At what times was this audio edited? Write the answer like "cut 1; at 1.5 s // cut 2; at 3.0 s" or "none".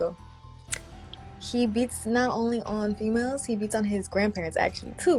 none